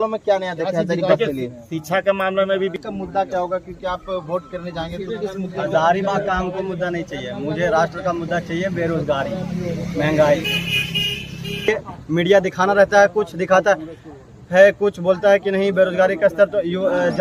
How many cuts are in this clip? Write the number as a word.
two